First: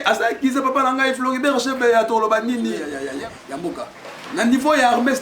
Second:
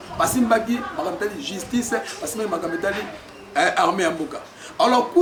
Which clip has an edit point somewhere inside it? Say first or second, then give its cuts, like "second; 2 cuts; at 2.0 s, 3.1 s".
first; 1 cut; at 2.9 s